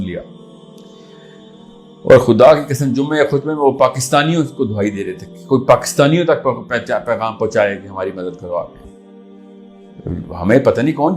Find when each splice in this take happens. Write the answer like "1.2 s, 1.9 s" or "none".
8.8 s